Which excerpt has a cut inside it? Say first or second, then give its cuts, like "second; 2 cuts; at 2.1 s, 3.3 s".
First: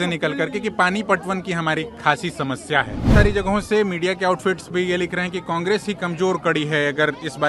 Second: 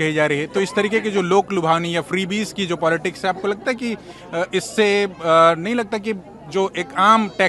first; 1 cut; at 3.1 s